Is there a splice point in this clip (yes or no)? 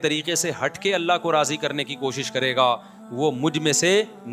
no